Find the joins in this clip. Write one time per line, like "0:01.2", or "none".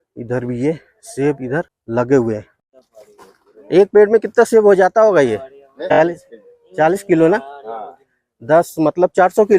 0:01.8
0:02.6
0:05.8